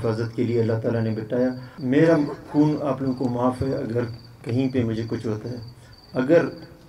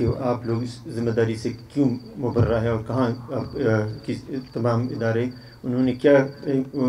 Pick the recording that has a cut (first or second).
first